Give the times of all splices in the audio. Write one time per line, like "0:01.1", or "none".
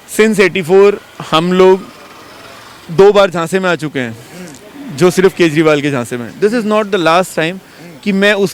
none